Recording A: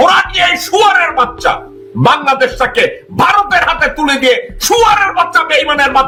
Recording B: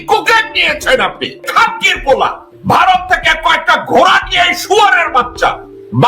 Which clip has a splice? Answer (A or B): B